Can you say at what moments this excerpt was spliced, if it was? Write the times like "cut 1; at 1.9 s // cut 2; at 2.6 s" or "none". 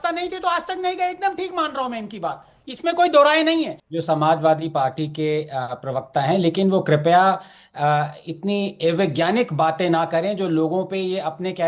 cut 1; at 3.8 s